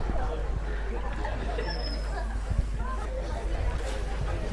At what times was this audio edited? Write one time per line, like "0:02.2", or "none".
0:03.0